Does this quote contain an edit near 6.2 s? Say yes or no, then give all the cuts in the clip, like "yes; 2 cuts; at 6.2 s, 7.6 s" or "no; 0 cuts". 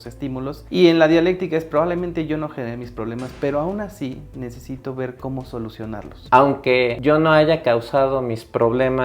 yes; 1 cut; at 6.2 s